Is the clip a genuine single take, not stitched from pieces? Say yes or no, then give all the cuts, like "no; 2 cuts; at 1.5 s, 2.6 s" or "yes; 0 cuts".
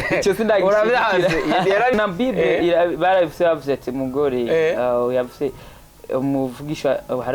no; 1 cut; at 1.9 s